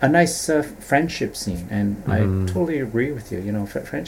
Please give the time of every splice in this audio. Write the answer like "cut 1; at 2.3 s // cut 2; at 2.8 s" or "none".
none